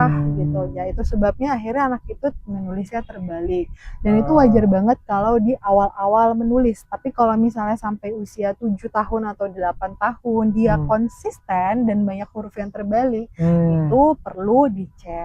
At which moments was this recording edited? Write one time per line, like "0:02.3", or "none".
none